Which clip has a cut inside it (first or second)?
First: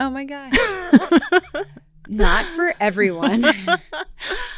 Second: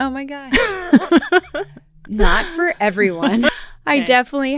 second